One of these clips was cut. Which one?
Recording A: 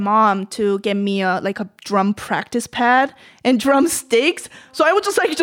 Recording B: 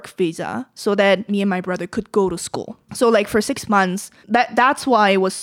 B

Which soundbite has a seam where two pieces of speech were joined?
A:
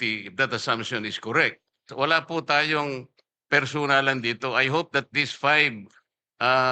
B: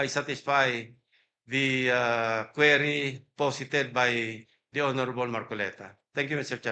A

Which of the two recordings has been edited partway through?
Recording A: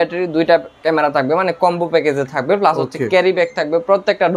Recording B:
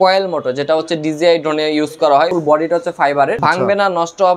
B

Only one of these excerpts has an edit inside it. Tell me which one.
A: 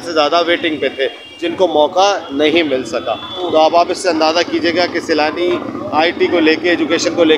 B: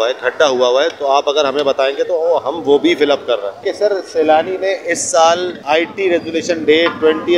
B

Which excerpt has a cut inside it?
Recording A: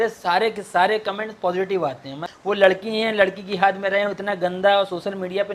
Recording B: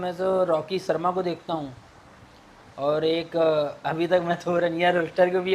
A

